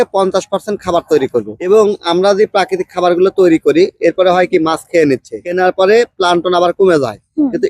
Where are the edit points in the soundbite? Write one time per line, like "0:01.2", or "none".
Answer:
0:05.4

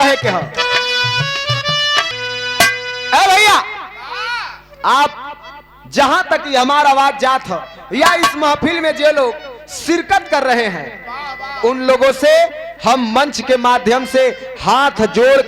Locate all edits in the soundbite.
0:02.1

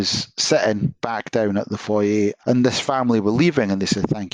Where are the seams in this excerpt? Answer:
0:02.4

